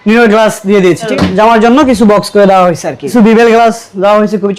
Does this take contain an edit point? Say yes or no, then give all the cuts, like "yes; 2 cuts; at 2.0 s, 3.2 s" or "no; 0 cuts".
yes; 2 cuts; at 1.1 s, 3.1 s